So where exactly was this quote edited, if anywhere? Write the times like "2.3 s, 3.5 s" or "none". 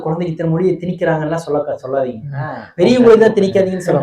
none

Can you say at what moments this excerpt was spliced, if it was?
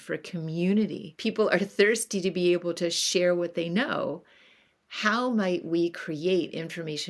1.1 s

